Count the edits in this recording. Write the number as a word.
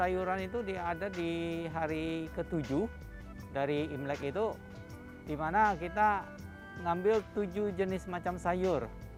zero